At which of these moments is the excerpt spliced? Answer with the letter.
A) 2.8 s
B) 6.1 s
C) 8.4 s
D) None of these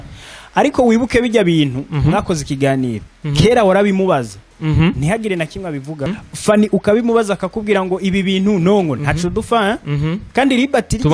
B